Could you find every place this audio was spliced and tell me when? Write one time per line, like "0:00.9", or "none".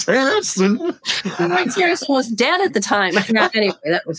0:03.3